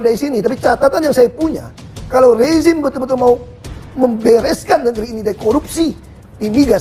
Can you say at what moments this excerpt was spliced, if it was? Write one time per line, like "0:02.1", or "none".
none